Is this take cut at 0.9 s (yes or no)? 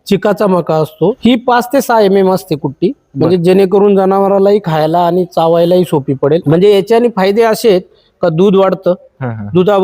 yes